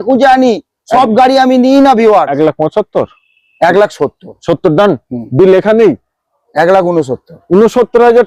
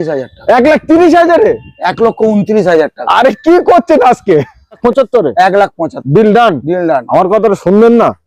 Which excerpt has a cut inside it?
second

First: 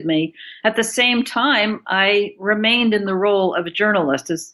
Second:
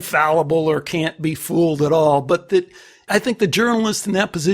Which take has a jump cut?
second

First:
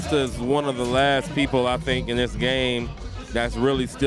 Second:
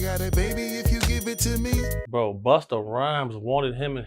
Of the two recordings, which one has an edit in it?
second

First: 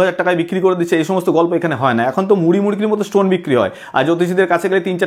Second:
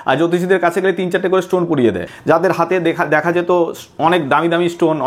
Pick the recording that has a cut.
second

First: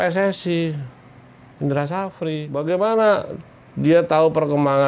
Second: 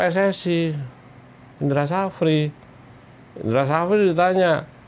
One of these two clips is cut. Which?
first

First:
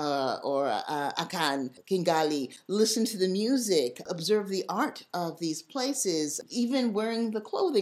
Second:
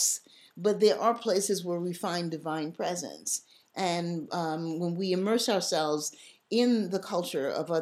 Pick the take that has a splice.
first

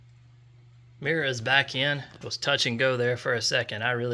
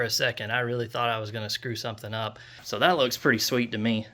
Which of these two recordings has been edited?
second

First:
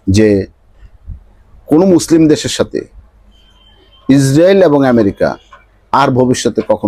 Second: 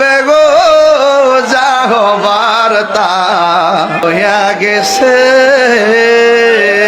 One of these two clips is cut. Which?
second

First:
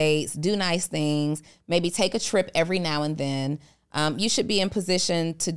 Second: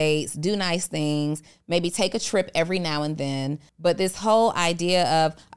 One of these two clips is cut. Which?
second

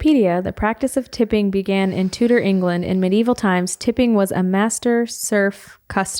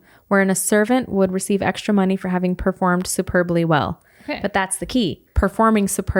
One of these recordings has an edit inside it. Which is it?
second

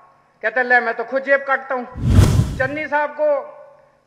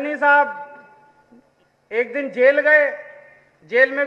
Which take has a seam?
first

